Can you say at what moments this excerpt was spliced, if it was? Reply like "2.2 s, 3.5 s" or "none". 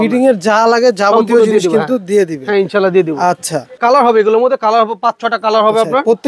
3.8 s